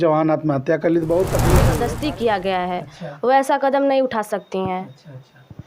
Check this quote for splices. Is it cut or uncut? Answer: cut